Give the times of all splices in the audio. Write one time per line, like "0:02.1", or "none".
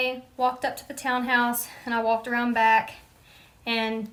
none